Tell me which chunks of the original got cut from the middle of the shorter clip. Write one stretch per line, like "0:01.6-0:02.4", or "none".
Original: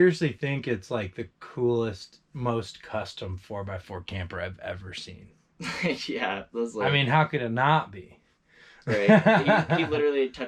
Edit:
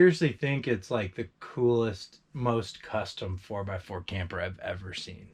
none